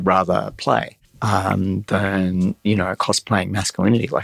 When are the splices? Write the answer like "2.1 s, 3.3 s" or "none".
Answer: 1.0 s